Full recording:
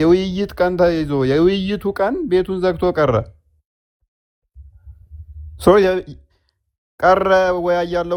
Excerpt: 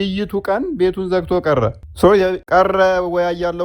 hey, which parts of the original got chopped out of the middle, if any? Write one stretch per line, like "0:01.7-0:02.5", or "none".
0:03.4-0:05.5
0:06.1-0:06.9